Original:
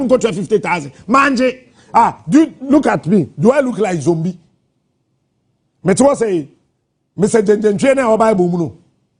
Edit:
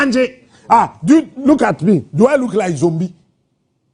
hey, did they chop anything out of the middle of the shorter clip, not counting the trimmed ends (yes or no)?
no